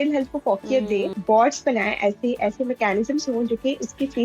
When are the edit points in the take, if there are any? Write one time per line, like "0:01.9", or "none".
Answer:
0:01.1